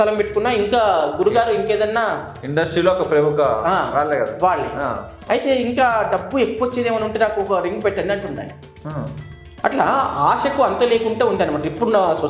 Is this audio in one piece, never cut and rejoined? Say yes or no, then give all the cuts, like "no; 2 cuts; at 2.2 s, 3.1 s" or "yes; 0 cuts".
yes; 0 cuts